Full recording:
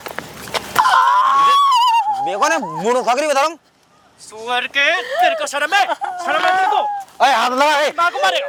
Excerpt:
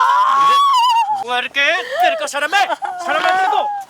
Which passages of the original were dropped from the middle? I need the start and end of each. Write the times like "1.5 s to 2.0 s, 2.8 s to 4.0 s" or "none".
2.2 s to 4.4 s